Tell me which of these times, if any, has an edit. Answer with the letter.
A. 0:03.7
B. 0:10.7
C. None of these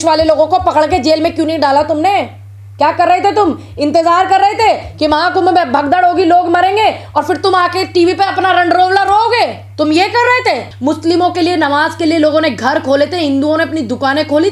B